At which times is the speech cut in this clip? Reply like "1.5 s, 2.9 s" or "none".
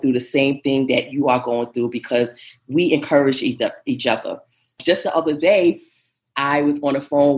4.8 s